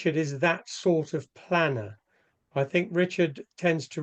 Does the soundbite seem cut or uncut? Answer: uncut